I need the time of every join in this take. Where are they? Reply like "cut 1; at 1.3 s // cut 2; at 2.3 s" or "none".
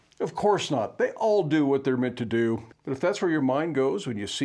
cut 1; at 2.7 s